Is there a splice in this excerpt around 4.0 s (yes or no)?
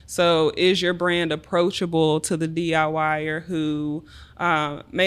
no